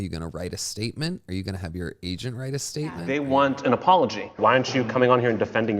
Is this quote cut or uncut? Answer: cut